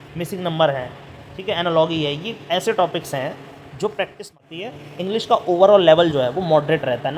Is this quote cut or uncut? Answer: cut